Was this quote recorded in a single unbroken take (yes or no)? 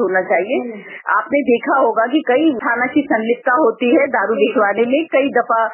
yes